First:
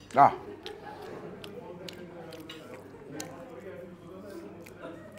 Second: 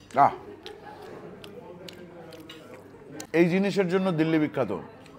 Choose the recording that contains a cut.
second; 1 cut; at 3.3 s

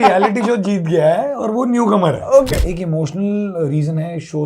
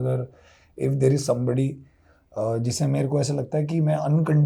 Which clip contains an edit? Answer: first; 1 cut; at 2.6 s

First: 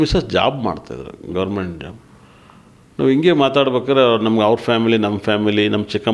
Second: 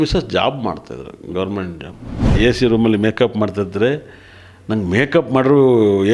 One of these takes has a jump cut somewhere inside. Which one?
second; 1 cut; at 2.3 s

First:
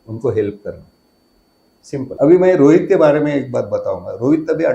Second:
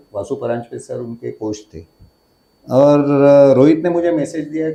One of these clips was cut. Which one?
first; 1 cut; at 2.1 s

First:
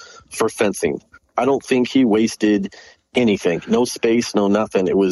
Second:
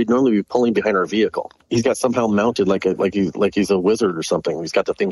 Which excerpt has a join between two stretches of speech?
second; 1 cut; at 1.6 s

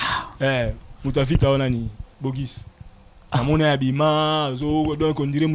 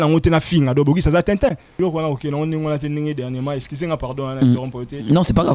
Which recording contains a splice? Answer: second; 1 cut; at 1.7 s

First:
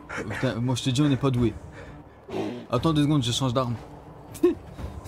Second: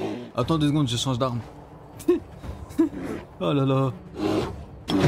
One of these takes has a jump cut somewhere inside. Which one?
second; 1 cut; at 4.1 s

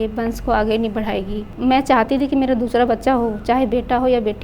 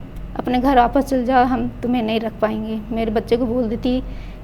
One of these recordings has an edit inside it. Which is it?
first; 1 cut; at 1.5 s

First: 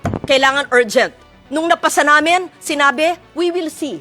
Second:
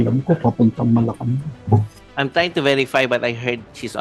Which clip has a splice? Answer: second; 1 cut; at 2.0 s

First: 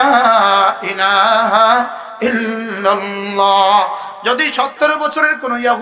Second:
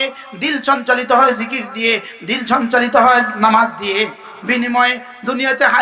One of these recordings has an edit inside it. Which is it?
second; 1 cut; at 4.3 s

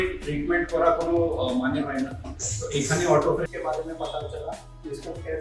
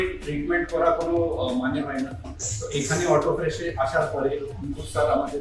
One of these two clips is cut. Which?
first; 1 cut; at 3.4 s

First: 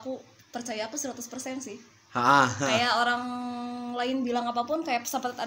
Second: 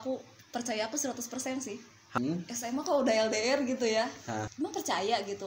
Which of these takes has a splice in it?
second; 2 cuts; at 2.0 s, 4.5 s

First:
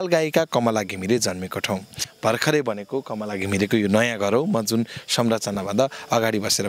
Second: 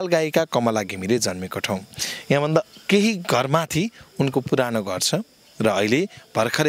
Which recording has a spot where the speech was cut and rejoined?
first; 1 cut; at 2.1 s

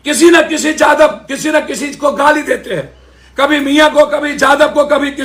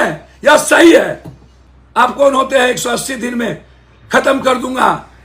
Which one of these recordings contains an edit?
second; 1 cut; at 2.1 s

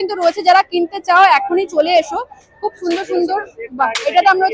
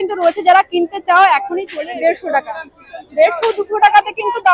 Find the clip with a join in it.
second; 1 cut; at 1.7 s

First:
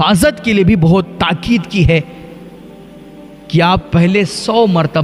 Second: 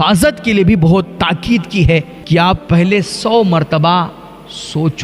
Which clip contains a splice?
second; 1 cut; at 2.1 s

